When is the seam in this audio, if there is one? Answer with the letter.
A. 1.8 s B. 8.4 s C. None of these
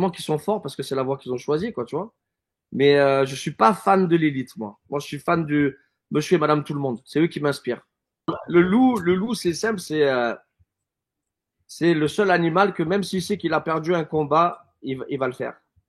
B